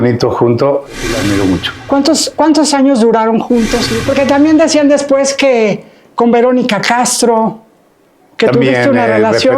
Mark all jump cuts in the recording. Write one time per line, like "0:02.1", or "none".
0:01.1
0:03.9